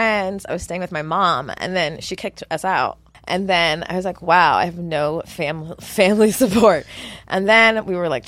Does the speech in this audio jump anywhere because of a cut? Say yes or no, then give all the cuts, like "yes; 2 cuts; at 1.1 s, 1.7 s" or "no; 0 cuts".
yes; 1 cut; at 3.1 s